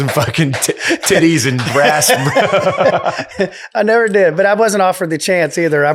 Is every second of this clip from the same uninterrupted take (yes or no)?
yes